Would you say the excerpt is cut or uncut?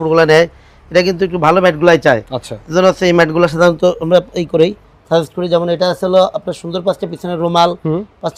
uncut